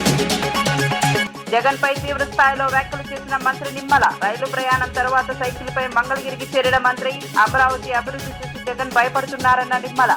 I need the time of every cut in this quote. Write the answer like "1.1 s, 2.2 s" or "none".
1.3 s